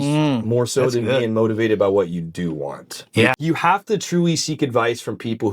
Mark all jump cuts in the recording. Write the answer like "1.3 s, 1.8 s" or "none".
3.3 s